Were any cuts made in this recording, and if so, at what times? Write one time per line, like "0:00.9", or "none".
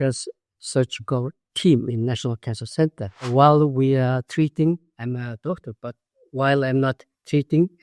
0:03.2